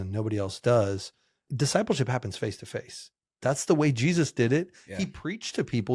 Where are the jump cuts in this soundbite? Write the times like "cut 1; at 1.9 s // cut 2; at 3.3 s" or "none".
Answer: cut 1; at 1.4 s // cut 2; at 3.3 s